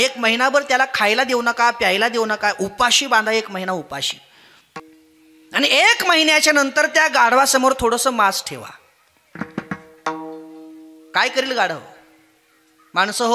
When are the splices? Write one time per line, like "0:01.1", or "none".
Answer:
0:04.8